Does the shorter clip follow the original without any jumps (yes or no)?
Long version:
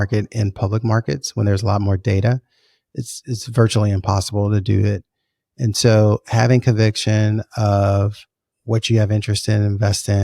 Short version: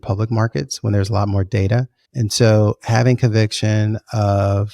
no